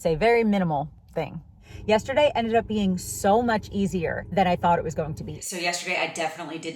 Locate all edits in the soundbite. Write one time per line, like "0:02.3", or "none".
0:01.6
0:05.3